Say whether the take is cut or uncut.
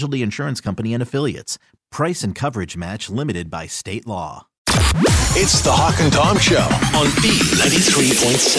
cut